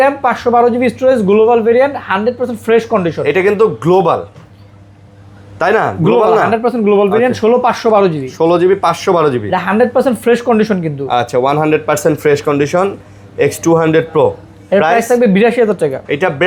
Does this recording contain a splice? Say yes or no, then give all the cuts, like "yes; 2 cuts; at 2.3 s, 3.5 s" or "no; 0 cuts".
no; 0 cuts